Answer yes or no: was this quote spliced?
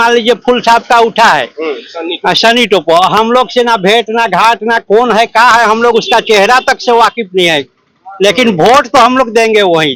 no